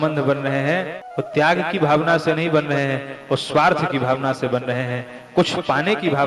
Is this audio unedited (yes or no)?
no